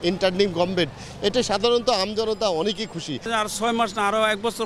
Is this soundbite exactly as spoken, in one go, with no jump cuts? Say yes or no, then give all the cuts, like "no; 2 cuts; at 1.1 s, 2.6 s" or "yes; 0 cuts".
no; 1 cut; at 3.3 s